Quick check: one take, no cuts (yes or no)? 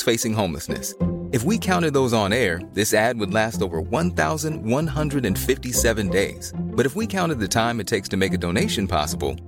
yes